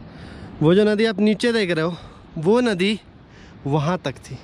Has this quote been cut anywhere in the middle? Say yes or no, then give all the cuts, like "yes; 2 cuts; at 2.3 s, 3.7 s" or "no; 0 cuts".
no; 0 cuts